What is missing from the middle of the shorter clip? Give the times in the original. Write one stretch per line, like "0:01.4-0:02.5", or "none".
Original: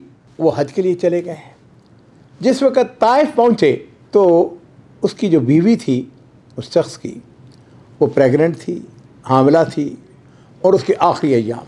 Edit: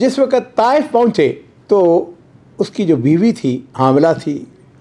0:06.1-0:09.2